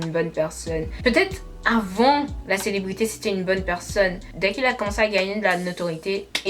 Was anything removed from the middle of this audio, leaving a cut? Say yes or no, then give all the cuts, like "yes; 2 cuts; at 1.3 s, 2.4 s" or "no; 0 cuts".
yes; 1 cut; at 0.9 s